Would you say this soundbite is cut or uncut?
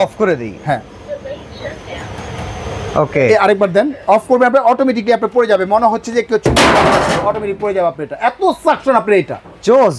uncut